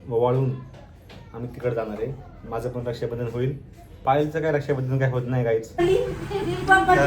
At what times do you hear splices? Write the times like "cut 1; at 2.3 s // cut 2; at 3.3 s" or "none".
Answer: cut 1; at 5.7 s